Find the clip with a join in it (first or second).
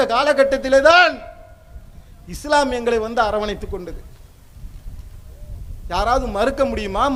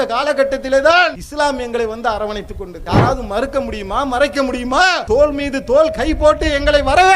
second